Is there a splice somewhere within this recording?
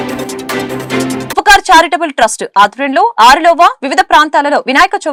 no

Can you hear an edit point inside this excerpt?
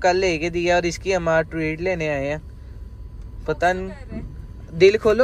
no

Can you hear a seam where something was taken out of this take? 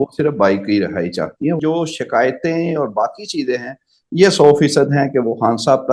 yes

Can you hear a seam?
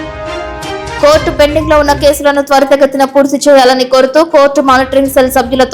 no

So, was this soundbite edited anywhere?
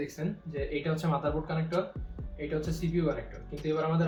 no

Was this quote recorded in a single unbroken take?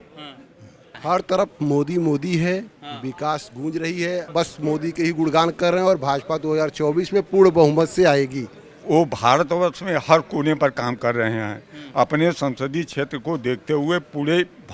no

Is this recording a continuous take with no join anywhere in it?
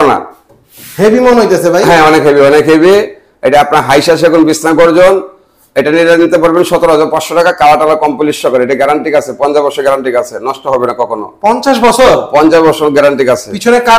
yes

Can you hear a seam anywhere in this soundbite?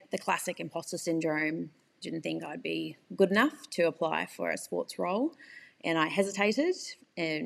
no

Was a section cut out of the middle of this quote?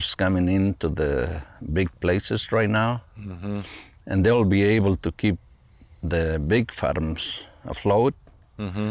no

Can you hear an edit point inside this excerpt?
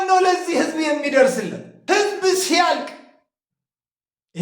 yes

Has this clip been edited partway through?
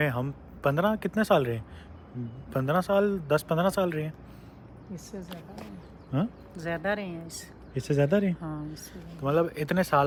no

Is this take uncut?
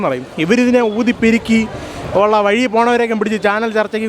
yes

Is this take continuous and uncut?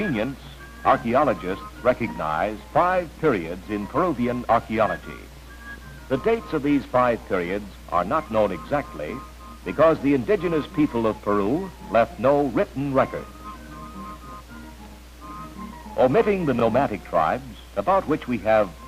yes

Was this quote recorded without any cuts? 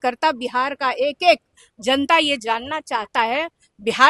yes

